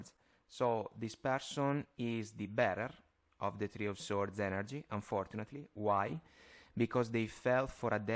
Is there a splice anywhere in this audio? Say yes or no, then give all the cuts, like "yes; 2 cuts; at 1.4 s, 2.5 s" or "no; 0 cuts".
no; 0 cuts